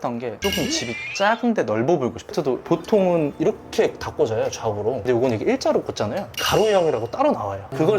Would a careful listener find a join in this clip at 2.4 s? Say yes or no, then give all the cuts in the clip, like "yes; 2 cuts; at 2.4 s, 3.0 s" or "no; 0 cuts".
yes; 1 cut; at 2.4 s